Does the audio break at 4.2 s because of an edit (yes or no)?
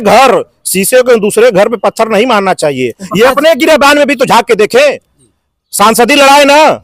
no